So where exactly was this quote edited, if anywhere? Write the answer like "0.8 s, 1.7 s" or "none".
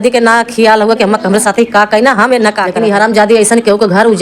2.7 s